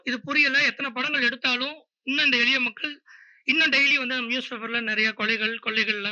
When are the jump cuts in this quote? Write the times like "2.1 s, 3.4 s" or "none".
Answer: none